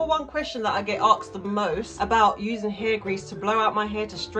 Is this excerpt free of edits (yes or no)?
no